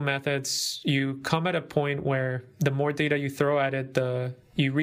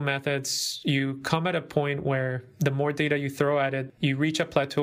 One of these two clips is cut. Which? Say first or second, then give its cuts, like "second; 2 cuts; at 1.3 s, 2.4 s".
second; 1 cut; at 3.8 s